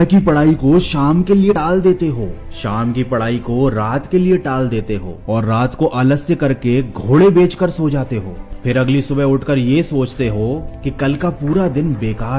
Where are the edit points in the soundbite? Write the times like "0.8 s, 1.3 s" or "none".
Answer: 1.5 s